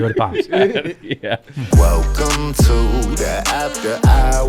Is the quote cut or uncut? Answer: cut